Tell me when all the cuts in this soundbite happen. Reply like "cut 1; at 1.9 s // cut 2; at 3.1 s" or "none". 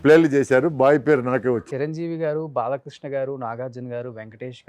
cut 1; at 1.6 s